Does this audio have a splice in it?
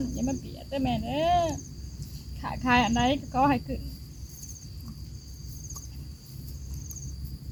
no; 0 cuts

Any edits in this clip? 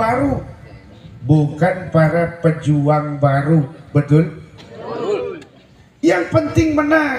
no; 0 cuts

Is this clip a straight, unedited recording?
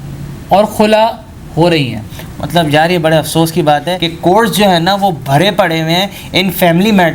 yes; 0 cuts

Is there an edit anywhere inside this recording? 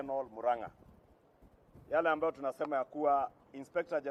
no; 0 cuts

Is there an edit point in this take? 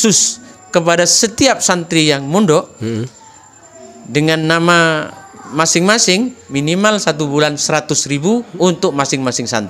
yes; 1 cut; at 6.4 s

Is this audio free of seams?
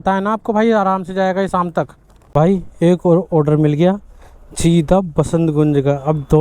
no; 1 cut; at 2.1 s

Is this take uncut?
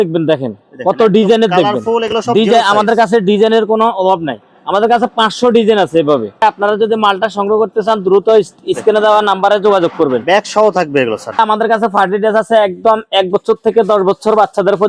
no; 2 cuts; at 6.4 s, 11.4 s

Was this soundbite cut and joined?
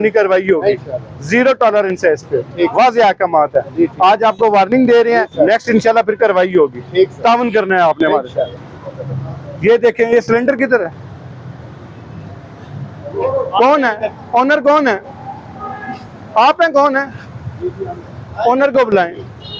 no; 0 cuts

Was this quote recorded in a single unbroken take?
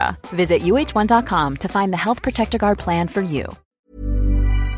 no; 1 cut; at 3.6 s

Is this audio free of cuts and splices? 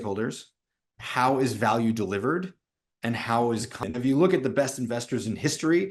no; 1 cut; at 3.8 s

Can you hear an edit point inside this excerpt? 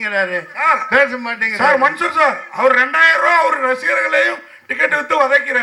no; 0 cuts

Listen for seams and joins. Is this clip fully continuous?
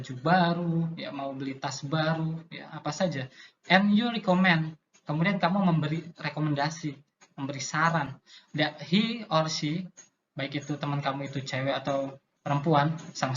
no; 1 cut; at 12.3 s

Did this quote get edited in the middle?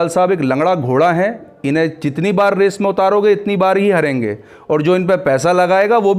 no; 0 cuts

